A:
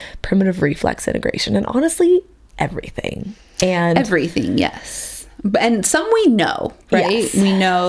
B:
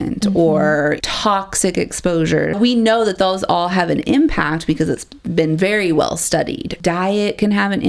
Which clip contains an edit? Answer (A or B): B